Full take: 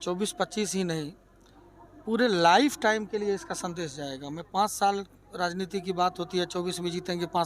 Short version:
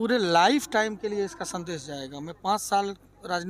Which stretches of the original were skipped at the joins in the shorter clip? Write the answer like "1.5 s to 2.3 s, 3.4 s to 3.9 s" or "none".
none